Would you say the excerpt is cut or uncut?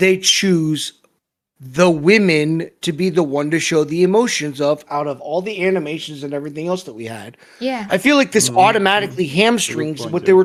uncut